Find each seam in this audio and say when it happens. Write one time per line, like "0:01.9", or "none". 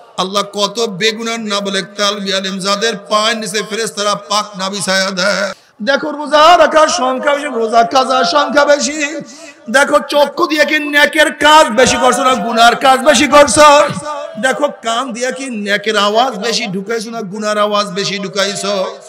0:05.6